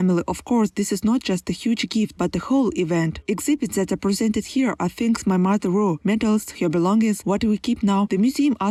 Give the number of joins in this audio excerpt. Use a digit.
0